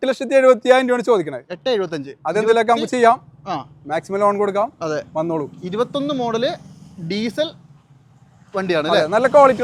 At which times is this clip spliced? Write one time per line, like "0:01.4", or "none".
none